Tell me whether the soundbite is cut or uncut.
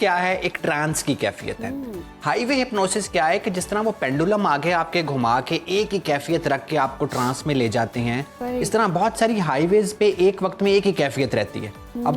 uncut